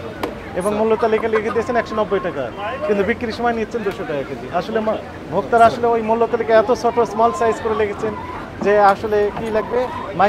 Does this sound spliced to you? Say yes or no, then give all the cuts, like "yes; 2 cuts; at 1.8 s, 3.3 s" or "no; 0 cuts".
no; 0 cuts